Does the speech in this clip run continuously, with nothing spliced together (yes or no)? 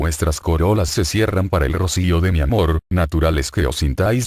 yes